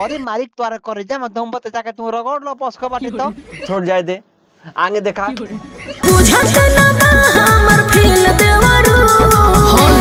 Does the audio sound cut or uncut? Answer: uncut